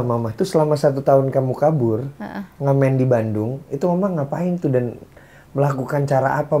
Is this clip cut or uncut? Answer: uncut